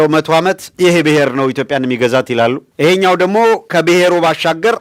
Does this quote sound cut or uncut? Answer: uncut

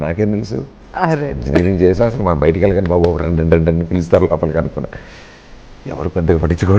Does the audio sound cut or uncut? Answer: uncut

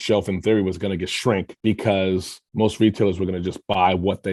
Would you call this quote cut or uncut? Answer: uncut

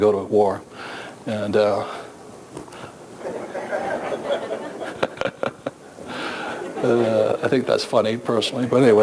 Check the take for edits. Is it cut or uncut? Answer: uncut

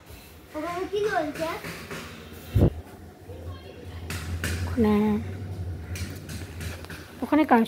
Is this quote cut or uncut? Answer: uncut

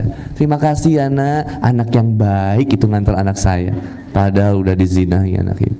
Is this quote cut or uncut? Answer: uncut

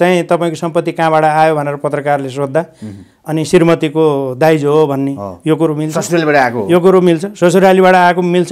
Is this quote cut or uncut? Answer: uncut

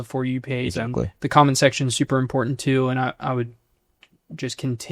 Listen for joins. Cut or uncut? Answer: uncut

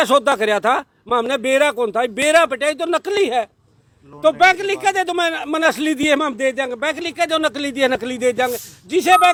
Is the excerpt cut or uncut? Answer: uncut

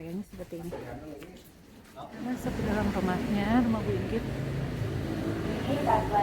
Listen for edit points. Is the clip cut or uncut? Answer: cut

